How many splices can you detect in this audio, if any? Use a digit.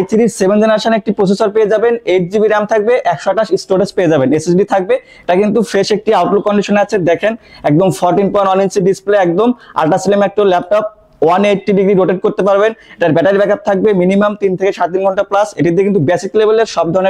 0